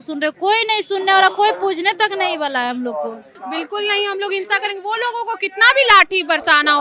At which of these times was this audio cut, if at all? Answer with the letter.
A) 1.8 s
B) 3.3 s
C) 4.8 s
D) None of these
B